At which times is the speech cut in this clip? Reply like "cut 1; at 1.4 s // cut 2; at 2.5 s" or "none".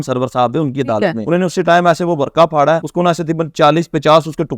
cut 1; at 1.2 s // cut 2; at 2.9 s